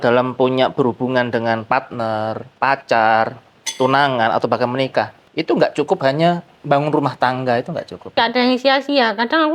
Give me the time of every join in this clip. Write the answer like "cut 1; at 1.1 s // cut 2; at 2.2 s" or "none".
cut 1; at 8.2 s